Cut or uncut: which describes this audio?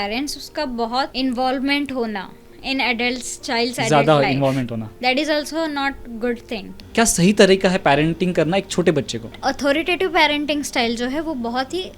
cut